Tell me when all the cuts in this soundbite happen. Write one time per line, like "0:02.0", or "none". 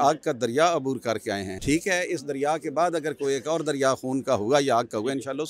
none